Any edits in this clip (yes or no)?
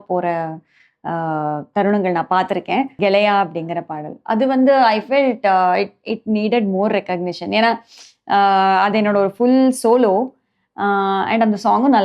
yes